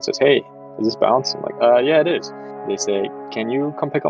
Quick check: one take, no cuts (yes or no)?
no